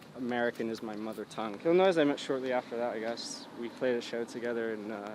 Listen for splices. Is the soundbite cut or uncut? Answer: cut